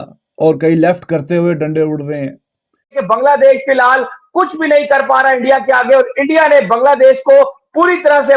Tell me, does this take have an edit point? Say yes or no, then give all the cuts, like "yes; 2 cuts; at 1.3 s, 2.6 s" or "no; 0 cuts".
yes; 1 cut; at 3.0 s